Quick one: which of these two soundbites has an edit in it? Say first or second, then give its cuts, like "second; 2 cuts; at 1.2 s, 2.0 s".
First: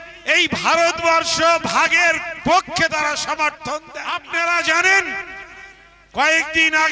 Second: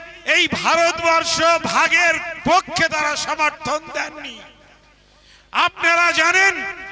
first; 1 cut; at 4.0 s